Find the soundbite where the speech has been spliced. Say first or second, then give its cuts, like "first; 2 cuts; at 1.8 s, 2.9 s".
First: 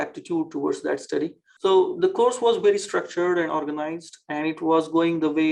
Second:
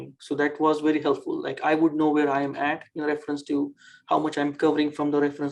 first; 1 cut; at 1.4 s